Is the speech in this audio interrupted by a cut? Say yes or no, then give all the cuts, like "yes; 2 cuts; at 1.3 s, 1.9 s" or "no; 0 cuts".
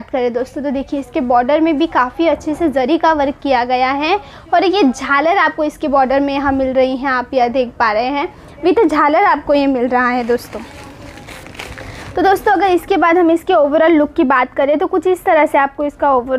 no; 0 cuts